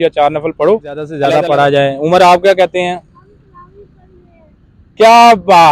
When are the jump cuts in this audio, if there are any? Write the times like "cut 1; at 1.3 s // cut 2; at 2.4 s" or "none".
cut 1; at 1.2 s